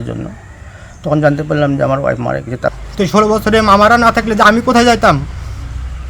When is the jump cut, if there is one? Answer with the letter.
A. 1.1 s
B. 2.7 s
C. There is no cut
B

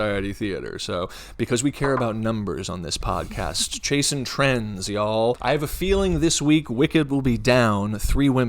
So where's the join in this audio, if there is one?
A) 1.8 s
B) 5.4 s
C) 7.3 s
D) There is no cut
B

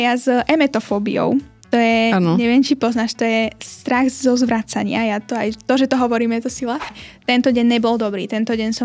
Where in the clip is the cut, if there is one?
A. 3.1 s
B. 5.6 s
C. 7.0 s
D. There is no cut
C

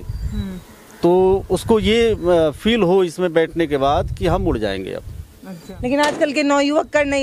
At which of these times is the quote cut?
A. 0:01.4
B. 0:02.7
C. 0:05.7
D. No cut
C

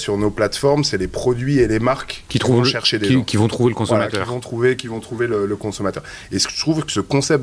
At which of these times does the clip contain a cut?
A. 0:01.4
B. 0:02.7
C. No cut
C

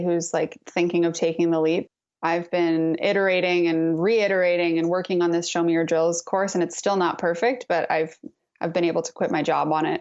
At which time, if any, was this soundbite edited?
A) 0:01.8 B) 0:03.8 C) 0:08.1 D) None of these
A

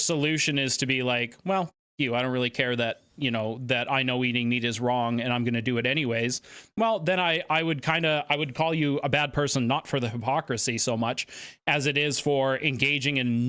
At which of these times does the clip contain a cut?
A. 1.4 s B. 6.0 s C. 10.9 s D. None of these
D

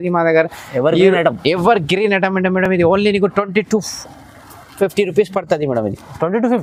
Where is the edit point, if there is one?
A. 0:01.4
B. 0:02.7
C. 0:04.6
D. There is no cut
D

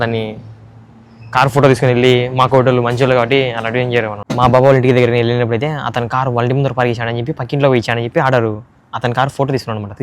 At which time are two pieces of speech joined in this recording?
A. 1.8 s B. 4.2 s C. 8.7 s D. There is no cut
B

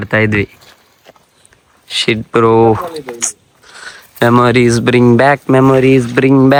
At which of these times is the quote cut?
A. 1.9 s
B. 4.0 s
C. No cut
C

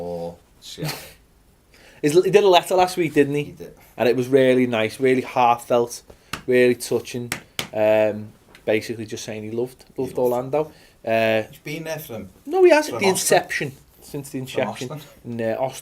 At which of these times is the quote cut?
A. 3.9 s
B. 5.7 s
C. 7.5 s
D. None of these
A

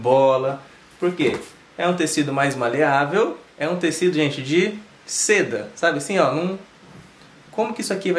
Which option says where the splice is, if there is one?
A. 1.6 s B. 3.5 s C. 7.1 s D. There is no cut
B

